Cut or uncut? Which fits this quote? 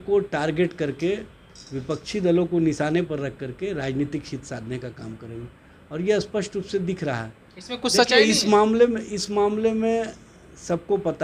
uncut